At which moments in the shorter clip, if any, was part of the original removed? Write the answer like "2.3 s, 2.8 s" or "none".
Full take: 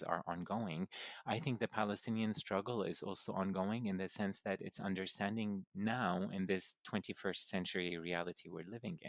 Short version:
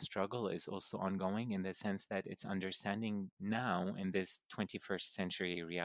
none